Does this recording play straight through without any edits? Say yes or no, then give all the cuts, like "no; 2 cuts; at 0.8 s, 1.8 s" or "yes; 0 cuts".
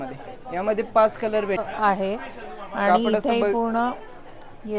no; 1 cut; at 1.6 s